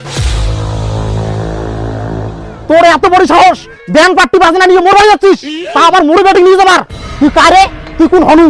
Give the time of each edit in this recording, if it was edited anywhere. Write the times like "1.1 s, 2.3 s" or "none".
none